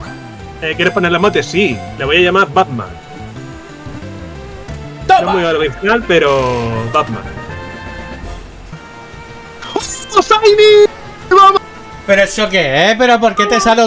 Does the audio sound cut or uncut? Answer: cut